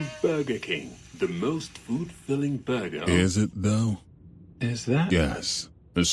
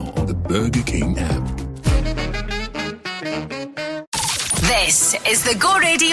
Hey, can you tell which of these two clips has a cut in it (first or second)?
second